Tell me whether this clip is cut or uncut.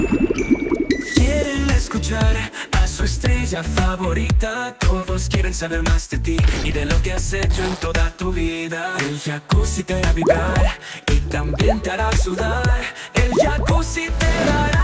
uncut